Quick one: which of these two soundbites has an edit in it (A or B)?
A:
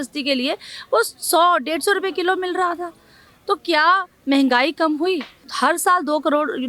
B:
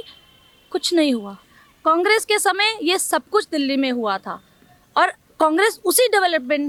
A